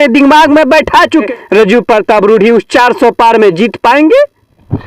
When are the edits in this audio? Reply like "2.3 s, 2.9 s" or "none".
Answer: 1.3 s